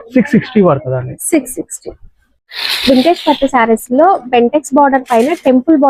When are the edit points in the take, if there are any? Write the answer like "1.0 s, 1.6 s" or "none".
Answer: none